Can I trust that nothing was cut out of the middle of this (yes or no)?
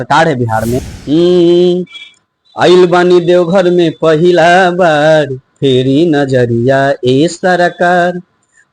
no